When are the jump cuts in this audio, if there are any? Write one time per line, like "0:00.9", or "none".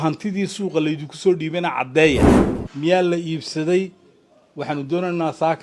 0:02.4